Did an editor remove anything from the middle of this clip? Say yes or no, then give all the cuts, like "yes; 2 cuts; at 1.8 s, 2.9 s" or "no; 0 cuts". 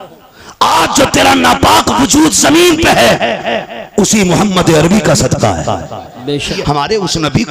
yes; 1 cut; at 6.5 s